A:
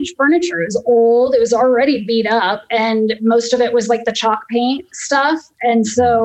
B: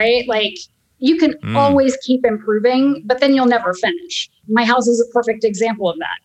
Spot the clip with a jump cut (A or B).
B